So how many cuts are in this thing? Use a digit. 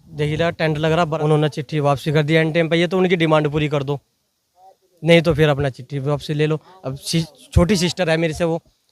1